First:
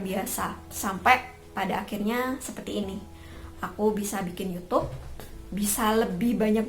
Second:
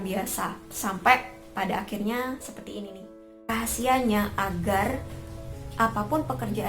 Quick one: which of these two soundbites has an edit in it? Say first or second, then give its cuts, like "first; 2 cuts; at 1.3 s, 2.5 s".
second; 1 cut; at 3.5 s